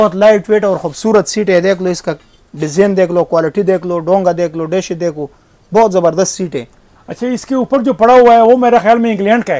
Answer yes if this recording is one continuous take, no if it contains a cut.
yes